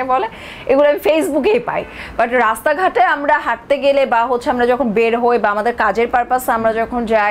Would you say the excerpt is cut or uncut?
uncut